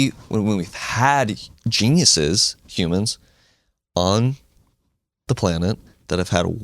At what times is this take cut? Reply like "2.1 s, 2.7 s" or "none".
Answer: none